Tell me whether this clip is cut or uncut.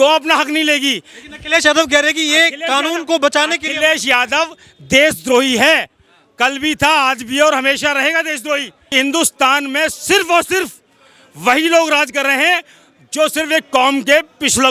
uncut